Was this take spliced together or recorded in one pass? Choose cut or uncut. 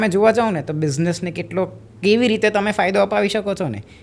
uncut